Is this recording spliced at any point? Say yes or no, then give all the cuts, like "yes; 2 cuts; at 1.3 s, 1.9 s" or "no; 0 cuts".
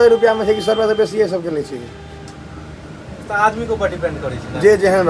no; 0 cuts